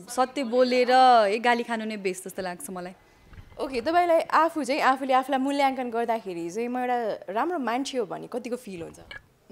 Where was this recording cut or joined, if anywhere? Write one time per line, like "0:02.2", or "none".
none